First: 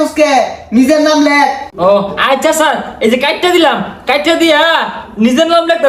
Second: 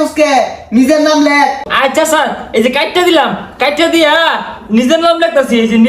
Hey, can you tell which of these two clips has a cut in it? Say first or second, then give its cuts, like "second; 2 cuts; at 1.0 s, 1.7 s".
second; 1 cut; at 1.7 s